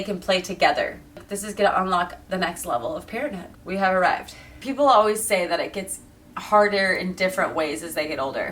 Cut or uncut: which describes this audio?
cut